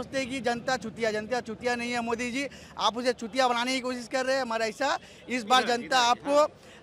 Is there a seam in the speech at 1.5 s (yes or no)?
no